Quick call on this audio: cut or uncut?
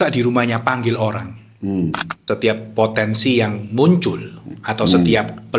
cut